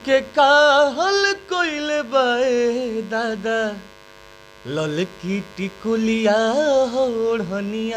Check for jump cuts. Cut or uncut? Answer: uncut